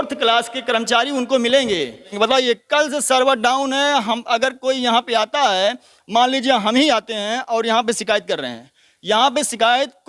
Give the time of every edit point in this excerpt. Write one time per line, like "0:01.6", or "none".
0:02.1

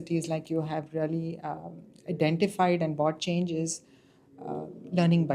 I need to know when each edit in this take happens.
none

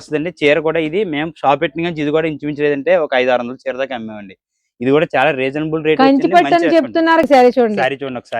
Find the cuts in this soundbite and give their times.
0:07.2

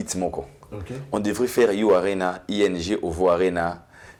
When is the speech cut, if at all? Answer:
none

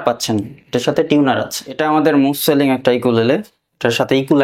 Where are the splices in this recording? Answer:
0:01.8

